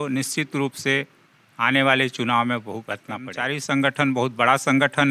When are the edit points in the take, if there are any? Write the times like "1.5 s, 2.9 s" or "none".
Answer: 3.4 s